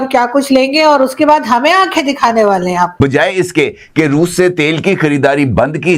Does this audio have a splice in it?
yes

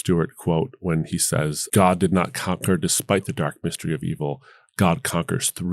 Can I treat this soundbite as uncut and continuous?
no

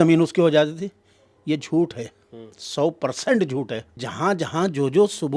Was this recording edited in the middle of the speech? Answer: yes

